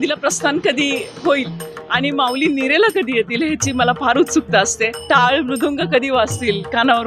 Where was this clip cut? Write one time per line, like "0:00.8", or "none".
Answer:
0:04.9